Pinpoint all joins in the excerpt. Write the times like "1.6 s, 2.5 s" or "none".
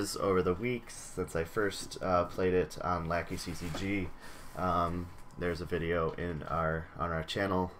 none